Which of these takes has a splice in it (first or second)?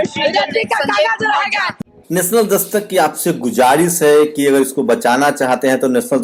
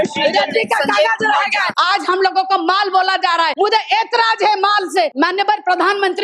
second